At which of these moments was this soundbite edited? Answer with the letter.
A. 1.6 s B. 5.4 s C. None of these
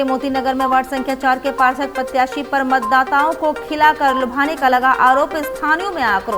C